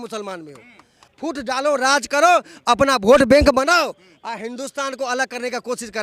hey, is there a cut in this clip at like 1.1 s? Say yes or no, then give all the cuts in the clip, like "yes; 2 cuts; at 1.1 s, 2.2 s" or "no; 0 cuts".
yes; 1 cut; at 1.1 s